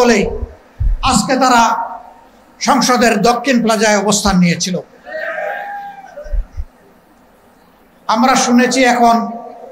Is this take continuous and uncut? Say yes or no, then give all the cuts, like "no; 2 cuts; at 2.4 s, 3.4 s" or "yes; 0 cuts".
yes; 0 cuts